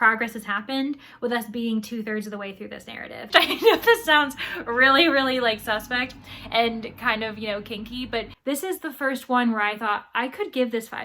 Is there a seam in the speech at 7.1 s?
no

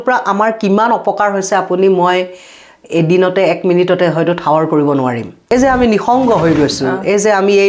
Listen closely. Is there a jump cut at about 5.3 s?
yes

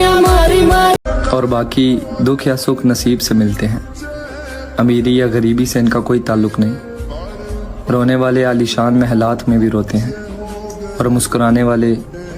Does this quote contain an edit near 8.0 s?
no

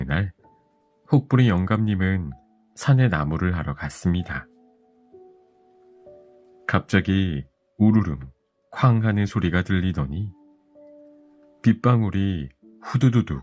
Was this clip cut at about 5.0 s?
yes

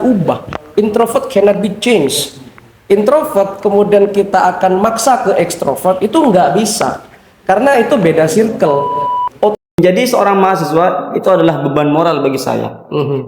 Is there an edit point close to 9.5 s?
yes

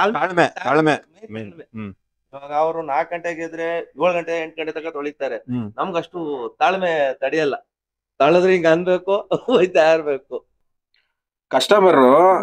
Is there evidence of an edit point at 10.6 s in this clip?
yes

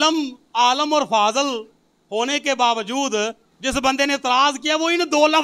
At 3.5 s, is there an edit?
yes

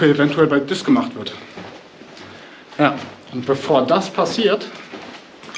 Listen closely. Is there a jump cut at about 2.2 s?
no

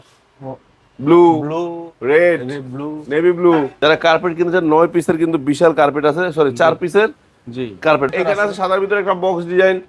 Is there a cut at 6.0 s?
no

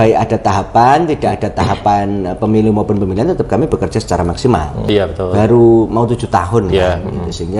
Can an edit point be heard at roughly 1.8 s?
no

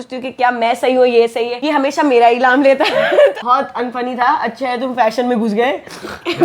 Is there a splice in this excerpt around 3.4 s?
yes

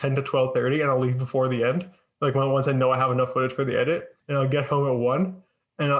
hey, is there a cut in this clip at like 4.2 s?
yes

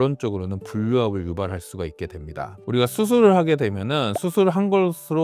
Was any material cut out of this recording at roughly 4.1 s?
no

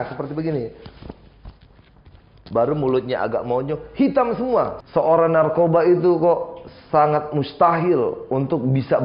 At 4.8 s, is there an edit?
yes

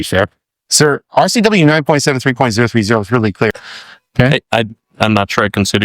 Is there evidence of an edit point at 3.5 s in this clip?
yes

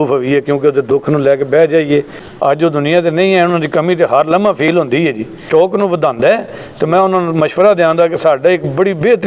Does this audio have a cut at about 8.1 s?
no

